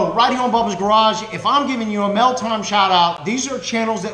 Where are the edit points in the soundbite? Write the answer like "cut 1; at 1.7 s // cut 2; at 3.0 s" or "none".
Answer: cut 1; at 3.2 s